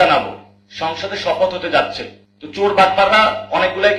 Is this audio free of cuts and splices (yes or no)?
yes